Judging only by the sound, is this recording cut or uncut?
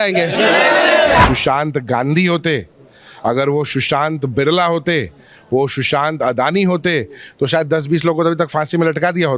cut